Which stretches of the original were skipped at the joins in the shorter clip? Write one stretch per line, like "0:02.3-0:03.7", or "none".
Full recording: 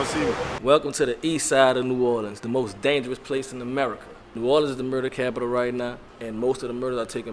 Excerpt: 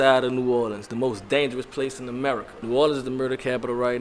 0:04.0-0:04.2